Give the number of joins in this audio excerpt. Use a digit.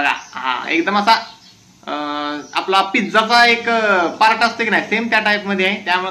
0